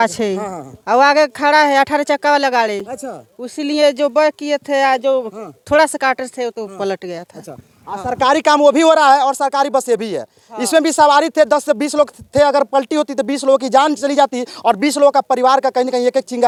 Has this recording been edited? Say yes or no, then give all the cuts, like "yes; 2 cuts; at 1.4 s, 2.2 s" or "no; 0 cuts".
no; 0 cuts